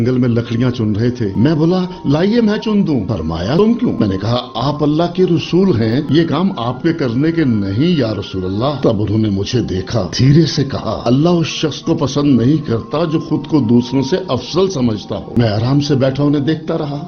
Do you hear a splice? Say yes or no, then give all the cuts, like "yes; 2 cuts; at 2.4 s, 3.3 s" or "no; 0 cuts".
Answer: no; 0 cuts